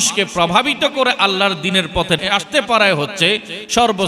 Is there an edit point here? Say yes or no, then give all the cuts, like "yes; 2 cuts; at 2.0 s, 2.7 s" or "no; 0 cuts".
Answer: yes; 1 cut; at 2.2 s